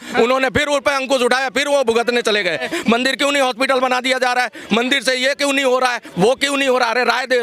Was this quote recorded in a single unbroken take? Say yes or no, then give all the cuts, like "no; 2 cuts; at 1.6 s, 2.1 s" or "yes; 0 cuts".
no; 1 cut; at 2.6 s